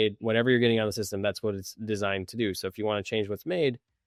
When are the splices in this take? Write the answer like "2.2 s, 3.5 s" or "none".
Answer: none